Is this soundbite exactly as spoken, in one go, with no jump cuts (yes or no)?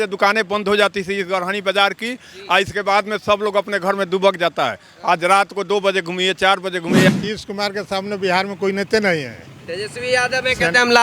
no